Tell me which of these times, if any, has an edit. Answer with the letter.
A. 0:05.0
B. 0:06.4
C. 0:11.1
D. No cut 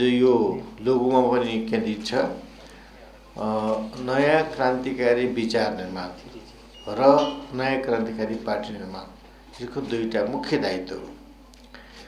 D